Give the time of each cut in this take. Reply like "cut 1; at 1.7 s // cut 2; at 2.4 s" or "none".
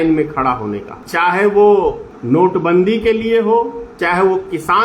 cut 1; at 0.9 s // cut 2; at 2.1 s // cut 3; at 3.8 s